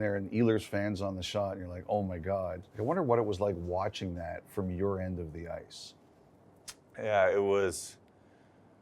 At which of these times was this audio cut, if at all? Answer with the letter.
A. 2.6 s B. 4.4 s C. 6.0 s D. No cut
A